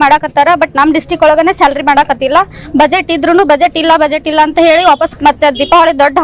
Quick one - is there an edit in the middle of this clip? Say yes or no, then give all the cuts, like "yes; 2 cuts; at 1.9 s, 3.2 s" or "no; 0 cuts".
yes; 1 cut; at 5.0 s